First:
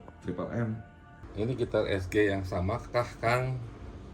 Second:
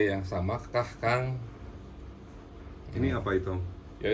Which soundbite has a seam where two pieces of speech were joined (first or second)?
first